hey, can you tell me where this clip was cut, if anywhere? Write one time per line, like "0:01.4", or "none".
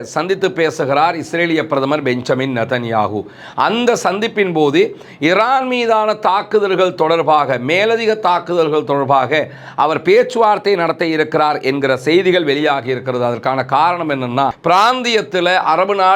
0:14.6